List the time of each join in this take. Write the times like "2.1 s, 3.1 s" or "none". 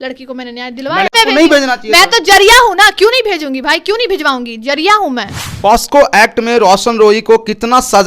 1.1 s, 5.4 s